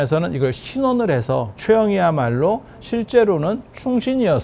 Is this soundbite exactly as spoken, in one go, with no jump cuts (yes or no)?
no